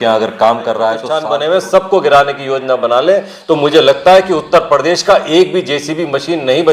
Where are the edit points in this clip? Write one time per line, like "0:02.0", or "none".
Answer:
0:01.1